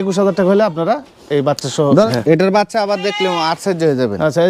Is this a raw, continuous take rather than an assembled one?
no; 1 cut; at 2.1 s

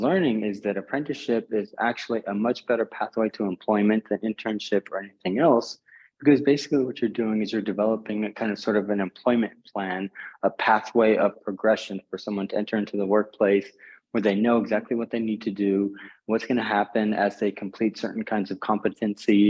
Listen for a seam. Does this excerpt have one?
no; 0 cuts

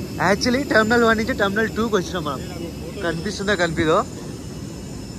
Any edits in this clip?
no; 0 cuts

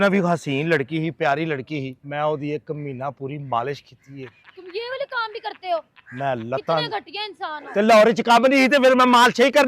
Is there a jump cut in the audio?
yes; 1 cut; at 2.0 s

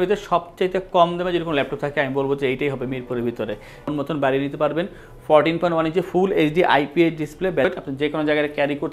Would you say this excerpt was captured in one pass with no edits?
no; 2 cuts; at 3.9 s, 7.7 s

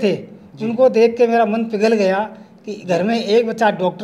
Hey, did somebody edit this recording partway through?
no; 0 cuts

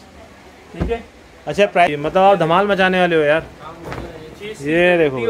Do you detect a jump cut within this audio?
yes; 1 cut; at 1.9 s

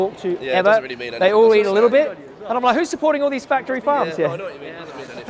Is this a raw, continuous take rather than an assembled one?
yes; 0 cuts

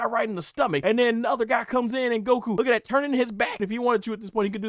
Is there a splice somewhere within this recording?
yes; 3 cuts; at 0.8 s, 2.5 s, 3.5 s

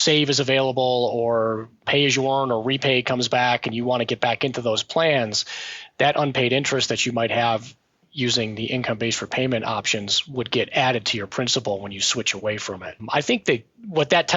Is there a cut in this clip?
yes; 2 cuts; at 1.7 s, 13.0 s

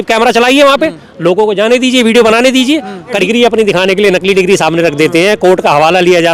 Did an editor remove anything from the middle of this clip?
yes; 1 cut; at 3.2 s

